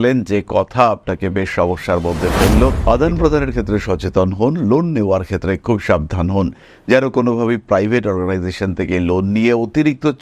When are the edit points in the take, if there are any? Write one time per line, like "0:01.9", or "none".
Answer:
0:02.8